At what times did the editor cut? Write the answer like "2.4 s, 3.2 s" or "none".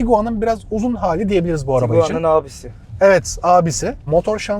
none